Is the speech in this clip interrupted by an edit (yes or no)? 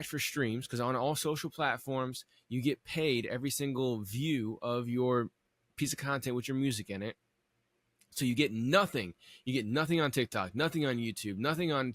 no